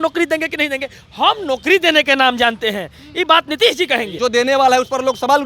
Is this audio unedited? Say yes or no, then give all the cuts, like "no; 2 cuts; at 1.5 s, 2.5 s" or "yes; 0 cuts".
no; 1 cut; at 4.1 s